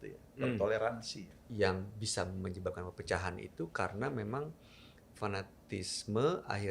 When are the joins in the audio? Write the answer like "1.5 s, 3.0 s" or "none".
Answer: 1.5 s